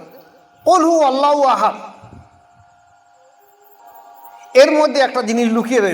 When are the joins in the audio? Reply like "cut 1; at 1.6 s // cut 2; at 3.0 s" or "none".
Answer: cut 1; at 3.8 s